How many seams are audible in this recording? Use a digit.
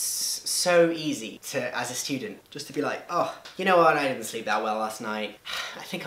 1